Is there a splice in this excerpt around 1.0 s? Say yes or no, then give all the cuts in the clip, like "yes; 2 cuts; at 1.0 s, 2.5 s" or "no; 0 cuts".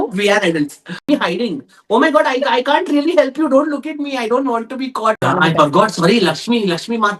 yes; 2 cuts; at 1.0 s, 5.2 s